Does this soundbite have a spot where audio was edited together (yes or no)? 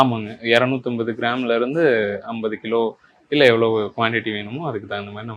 no